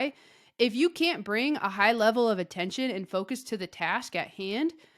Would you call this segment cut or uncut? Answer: uncut